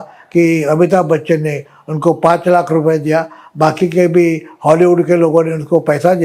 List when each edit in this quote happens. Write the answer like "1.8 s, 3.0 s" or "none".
none